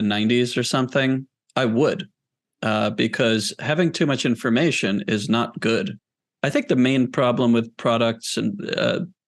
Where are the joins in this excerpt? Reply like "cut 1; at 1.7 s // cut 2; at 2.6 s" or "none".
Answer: cut 1; at 6.0 s

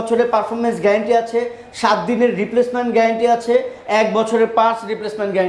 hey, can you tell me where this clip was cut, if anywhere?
none

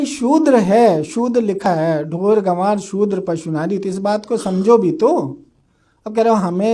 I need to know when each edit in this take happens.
cut 1; at 1.7 s

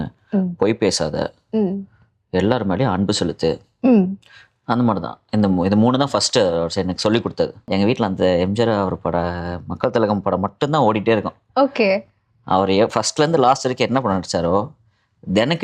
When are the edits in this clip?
cut 1; at 7.7 s

